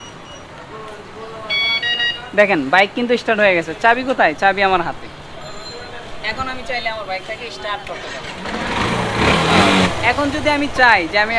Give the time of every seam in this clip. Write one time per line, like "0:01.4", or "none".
0:09.7